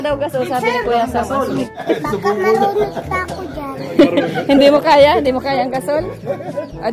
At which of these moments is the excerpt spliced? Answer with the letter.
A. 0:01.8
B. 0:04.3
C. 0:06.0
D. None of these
A